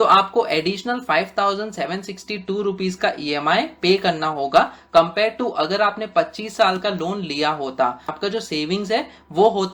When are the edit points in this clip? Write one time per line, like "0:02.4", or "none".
0:08.1